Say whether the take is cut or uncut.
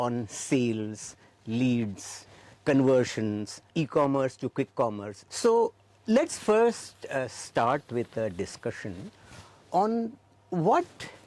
uncut